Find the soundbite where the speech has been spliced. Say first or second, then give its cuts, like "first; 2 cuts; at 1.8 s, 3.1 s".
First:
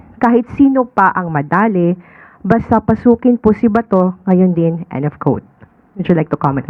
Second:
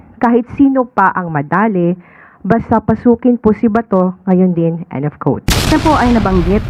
second; 1 cut; at 5.7 s